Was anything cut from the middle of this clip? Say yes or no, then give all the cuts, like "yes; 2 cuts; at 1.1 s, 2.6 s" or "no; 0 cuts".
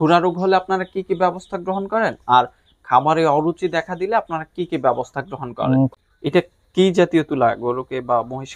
yes; 1 cut; at 5.9 s